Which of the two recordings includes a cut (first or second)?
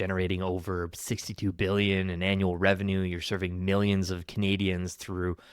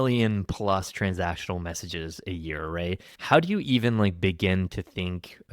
second